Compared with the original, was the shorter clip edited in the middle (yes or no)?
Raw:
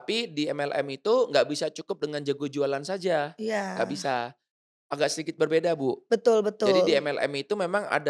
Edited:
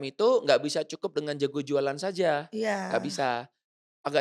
no